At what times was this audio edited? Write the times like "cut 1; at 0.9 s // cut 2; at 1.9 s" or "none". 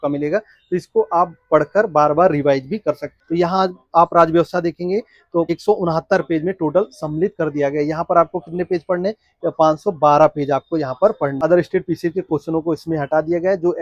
cut 1; at 3.1 s // cut 2; at 5.5 s // cut 3; at 11.4 s